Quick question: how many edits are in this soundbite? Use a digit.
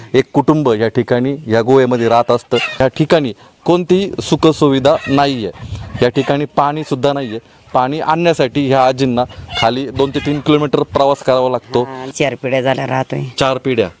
2